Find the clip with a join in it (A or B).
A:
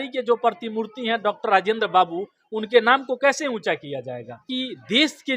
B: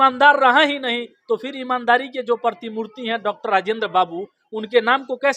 A